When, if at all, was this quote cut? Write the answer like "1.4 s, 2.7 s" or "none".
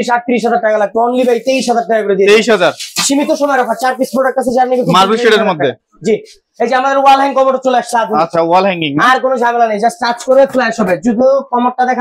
none